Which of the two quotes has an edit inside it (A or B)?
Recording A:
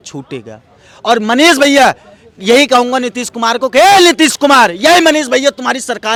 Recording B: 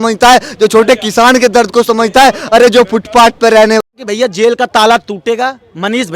B